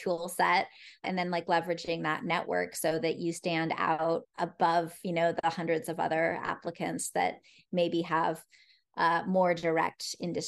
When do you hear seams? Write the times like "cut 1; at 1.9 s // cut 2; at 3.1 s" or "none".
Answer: cut 1; at 1.0 s // cut 2; at 4.3 s